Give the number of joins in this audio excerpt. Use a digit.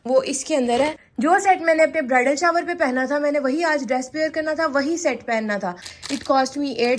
2